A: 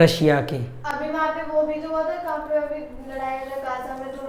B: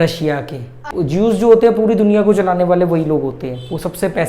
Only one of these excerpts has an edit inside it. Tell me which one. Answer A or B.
B